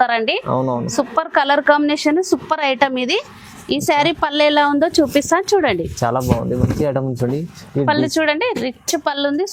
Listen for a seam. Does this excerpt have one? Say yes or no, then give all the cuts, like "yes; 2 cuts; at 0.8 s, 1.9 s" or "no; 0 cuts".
no; 0 cuts